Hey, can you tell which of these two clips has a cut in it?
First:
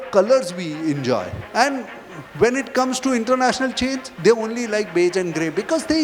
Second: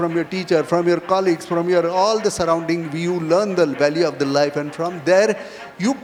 first; 1 cut; at 1.4 s

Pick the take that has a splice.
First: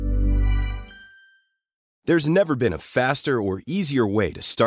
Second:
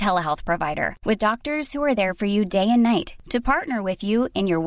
first; 1 cut; at 1.8 s

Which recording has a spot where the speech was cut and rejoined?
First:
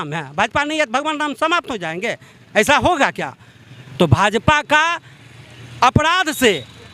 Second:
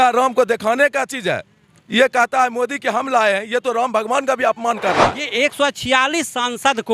second; 1 cut; at 5.2 s

